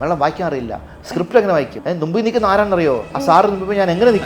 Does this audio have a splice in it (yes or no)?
yes